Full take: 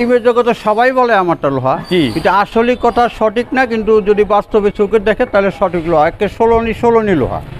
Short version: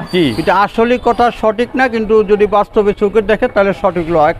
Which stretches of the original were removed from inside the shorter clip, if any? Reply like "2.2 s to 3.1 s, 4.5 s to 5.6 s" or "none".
none